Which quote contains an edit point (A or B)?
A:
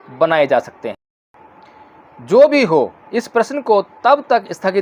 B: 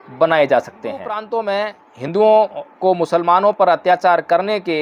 B